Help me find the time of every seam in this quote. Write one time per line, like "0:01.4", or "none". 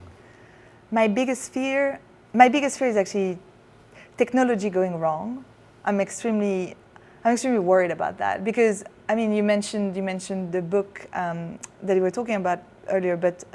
none